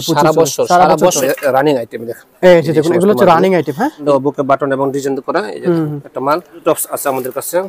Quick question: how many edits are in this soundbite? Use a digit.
3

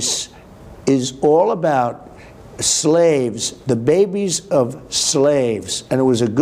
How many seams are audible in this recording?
0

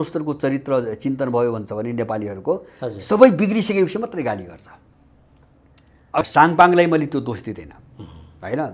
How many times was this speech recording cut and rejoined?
1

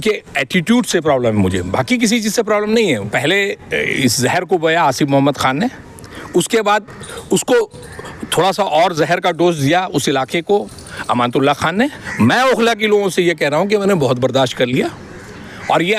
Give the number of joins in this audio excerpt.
2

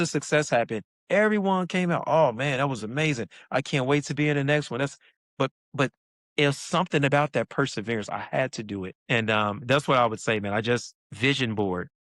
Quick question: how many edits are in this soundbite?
3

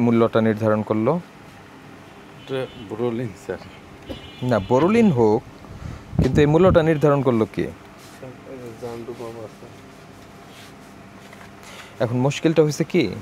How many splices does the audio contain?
0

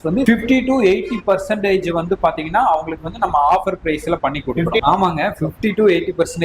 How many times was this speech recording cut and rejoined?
1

